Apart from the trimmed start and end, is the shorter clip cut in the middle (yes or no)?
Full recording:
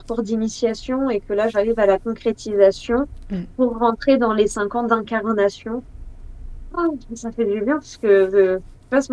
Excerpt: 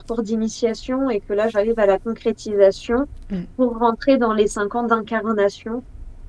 no